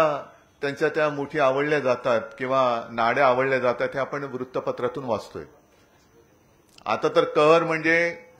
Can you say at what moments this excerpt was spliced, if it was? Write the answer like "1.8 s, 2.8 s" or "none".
none